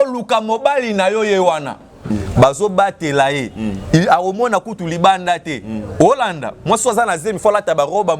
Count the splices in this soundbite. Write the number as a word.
one